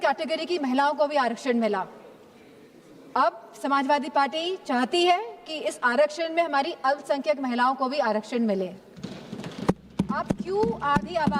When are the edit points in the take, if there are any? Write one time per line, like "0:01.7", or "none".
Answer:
none